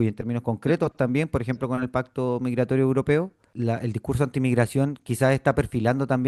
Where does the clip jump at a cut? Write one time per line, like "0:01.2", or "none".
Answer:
0:03.4